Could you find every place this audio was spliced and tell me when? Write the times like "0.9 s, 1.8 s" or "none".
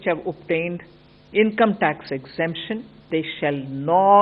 3.1 s